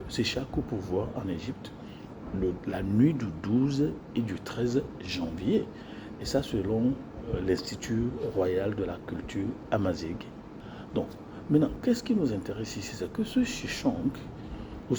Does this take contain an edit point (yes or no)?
yes